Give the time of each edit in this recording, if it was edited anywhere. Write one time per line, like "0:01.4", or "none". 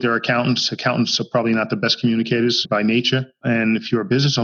none

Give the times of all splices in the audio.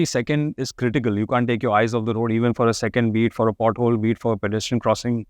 none

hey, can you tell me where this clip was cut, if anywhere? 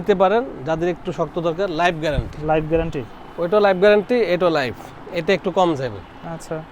none

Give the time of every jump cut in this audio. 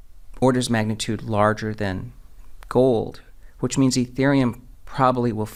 none

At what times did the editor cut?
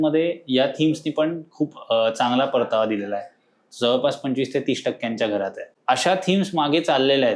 0:05.7

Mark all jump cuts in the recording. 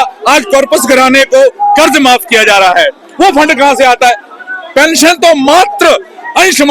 none

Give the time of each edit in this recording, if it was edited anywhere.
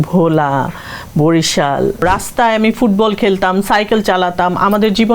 0:02.0

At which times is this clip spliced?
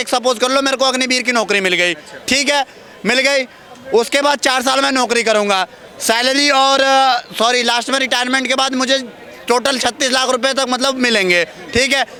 none

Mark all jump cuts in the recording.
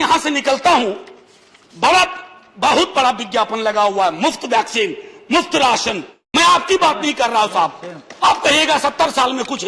0:06.1

